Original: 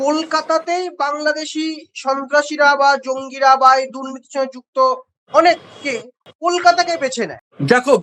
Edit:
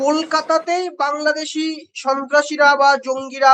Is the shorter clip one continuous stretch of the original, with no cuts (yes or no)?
yes